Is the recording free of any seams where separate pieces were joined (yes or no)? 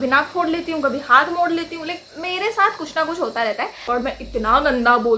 no